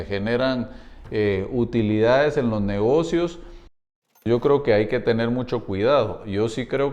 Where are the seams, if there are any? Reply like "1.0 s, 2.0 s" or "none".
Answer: 3.7 s